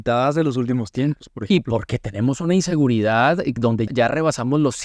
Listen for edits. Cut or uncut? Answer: cut